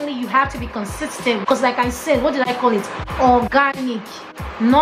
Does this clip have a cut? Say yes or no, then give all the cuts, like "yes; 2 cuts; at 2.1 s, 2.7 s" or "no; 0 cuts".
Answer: yes; 1 cut; at 1.4 s